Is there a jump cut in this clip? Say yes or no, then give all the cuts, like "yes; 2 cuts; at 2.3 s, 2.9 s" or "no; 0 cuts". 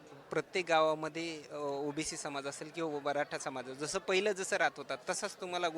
no; 0 cuts